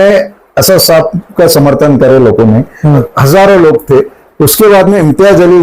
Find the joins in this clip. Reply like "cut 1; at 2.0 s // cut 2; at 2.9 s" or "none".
cut 1; at 3.0 s